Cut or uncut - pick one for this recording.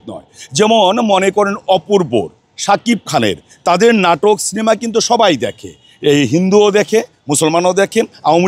uncut